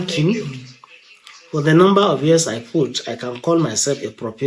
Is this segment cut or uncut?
uncut